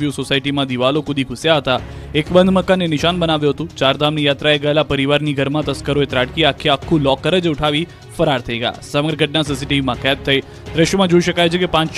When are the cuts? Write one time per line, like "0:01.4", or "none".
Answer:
0:07.0